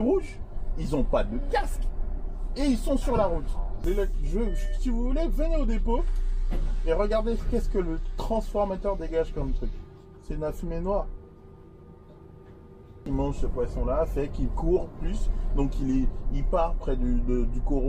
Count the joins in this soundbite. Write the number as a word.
two